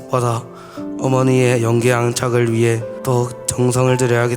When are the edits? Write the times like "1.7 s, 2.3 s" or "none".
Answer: 2.9 s